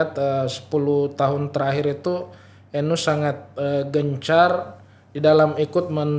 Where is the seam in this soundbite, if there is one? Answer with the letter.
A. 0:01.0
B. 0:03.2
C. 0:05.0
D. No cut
D